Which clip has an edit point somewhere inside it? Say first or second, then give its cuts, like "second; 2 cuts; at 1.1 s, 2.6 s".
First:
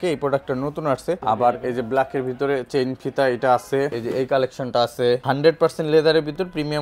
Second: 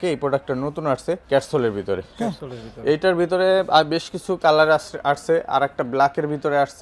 first; 3 cuts; at 1.2 s, 4.0 s, 5.2 s